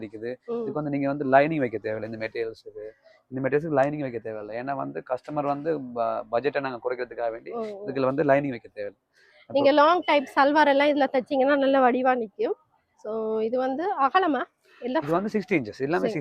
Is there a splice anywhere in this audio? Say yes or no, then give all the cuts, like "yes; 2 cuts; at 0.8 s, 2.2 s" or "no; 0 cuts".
no; 0 cuts